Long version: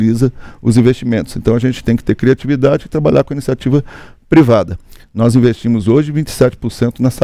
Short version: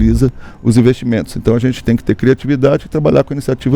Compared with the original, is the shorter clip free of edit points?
yes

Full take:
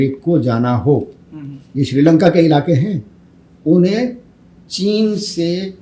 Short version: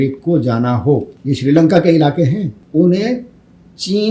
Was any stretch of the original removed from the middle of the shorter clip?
yes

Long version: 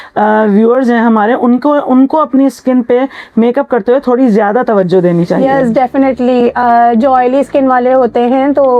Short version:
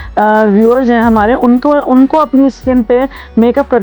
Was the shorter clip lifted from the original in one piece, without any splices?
yes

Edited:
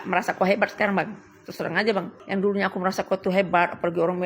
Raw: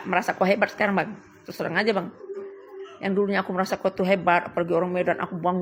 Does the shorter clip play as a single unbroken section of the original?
no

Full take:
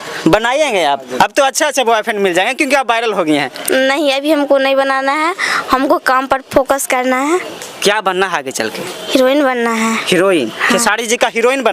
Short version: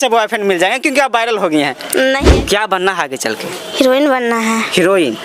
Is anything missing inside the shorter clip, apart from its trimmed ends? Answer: yes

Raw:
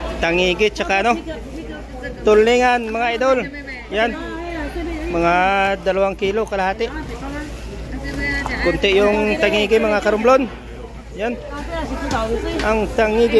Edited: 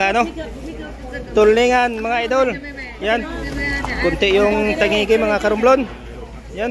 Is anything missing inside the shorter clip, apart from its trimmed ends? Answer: yes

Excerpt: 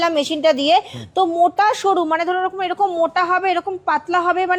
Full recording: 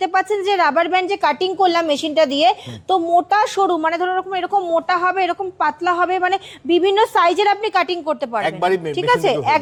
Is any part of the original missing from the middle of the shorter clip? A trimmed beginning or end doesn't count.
no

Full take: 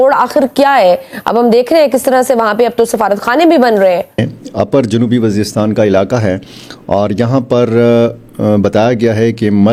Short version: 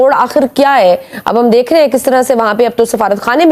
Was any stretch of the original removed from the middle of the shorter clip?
no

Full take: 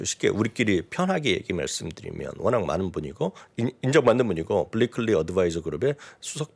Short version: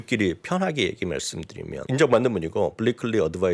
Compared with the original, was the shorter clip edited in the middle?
yes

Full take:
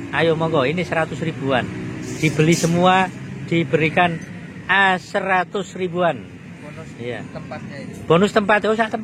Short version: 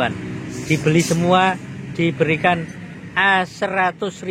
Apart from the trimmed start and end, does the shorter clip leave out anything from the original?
no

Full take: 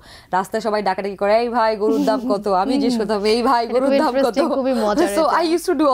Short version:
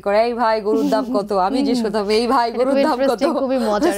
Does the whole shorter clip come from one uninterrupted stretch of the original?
yes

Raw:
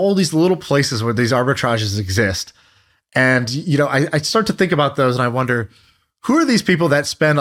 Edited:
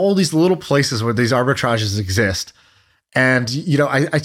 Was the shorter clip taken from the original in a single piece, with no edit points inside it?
yes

